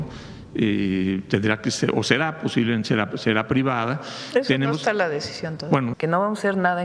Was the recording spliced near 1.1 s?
no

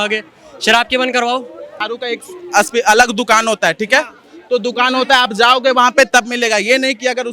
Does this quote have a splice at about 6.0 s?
no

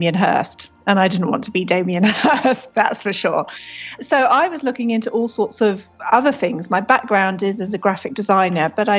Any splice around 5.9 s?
no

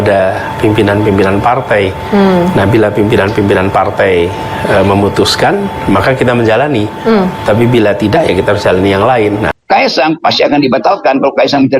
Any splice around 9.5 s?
yes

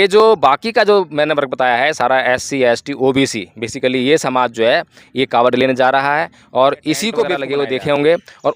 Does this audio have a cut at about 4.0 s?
no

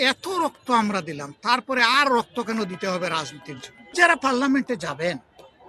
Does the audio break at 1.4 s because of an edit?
no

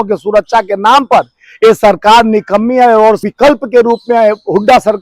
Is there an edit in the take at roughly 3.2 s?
yes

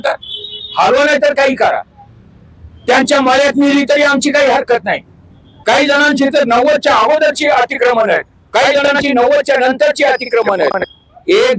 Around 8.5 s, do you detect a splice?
no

